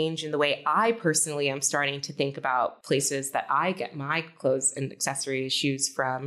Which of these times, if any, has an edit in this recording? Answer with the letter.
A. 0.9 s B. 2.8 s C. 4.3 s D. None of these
B